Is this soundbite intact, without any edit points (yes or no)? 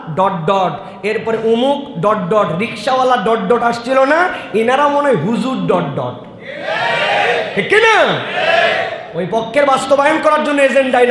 yes